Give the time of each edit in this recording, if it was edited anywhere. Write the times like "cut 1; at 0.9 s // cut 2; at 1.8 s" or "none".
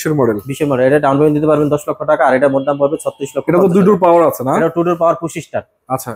none